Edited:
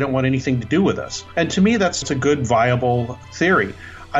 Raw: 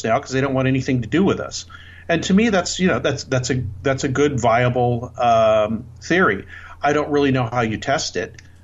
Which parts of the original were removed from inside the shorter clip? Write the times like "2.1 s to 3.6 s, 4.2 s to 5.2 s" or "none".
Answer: 1.6 s to 1.9 s, 2.8 s to 4.0 s, 5.1 s to 5.8 s